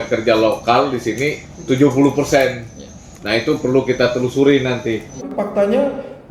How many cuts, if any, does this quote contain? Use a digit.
1